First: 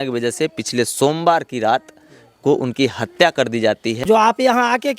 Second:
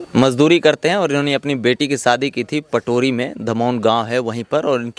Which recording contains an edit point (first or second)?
first